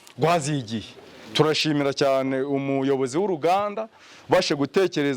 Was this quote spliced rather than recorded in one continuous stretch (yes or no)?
no